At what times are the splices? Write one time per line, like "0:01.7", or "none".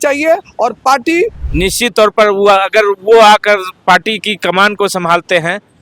0:01.4